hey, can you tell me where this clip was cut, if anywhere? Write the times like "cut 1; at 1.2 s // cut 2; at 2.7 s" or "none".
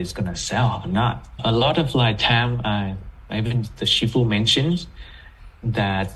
none